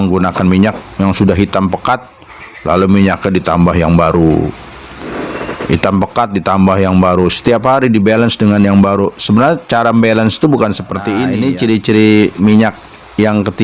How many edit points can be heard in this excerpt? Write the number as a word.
one